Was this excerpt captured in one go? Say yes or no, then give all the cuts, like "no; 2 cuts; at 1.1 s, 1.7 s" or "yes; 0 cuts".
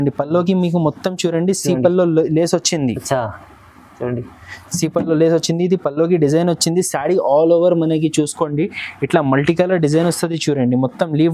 yes; 0 cuts